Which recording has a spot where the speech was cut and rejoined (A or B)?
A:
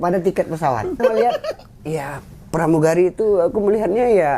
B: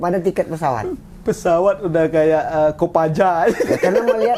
A